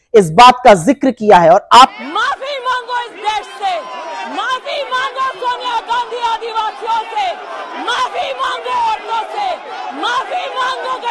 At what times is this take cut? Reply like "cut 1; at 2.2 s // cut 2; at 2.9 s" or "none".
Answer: cut 1; at 1.9 s